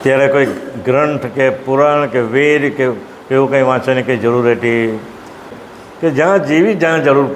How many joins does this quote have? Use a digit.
1